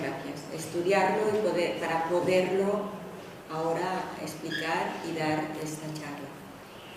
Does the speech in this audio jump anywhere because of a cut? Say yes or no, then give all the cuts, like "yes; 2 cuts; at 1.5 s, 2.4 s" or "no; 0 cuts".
no; 0 cuts